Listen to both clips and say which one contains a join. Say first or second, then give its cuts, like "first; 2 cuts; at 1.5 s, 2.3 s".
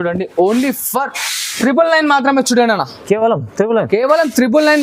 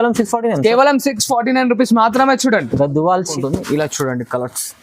second; 1 cut; at 3.3 s